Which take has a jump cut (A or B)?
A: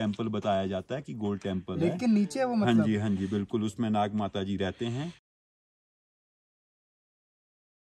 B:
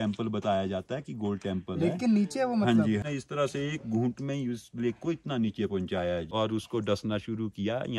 B